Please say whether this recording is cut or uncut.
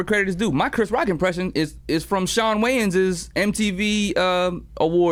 uncut